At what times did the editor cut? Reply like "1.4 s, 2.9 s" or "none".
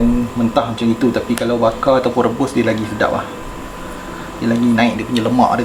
none